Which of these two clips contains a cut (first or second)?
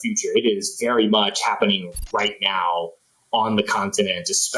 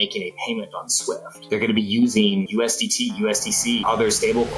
second